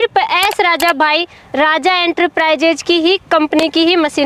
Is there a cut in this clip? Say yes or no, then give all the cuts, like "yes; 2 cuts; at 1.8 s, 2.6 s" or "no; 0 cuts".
no; 0 cuts